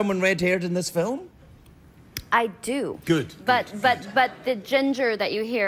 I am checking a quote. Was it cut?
no; 0 cuts

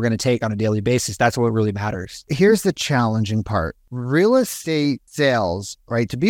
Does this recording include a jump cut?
yes; 3 cuts; at 2.3 s, 3.9 s, 4.8 s

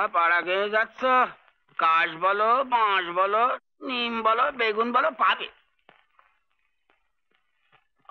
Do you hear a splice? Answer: no; 0 cuts

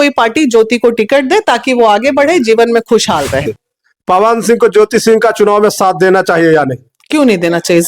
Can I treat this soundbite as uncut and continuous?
no; 1 cut; at 3.4 s

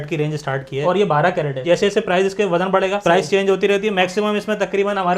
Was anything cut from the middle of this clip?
yes; 2 cuts; at 0.8 s, 1.6 s

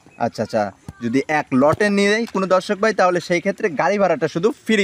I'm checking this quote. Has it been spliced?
no; 0 cuts

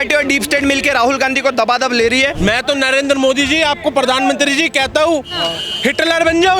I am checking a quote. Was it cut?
yes; 1 cut; at 2.3 s

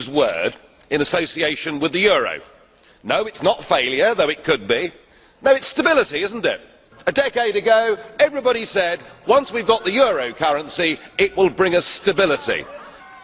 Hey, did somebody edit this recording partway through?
no; 0 cuts

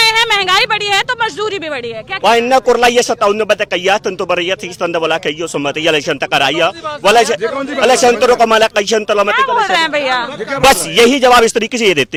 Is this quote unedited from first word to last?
yes; 0 cuts

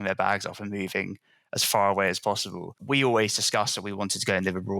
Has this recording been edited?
yes; 1 cut; at 2.8 s

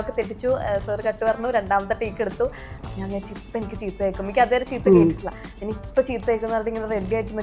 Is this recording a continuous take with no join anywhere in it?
no; 1 cut; at 2.8 s

